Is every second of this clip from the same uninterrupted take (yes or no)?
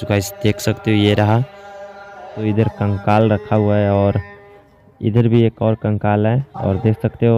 no